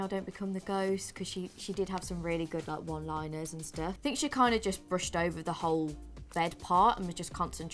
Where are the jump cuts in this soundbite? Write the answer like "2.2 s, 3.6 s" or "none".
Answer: 4.0 s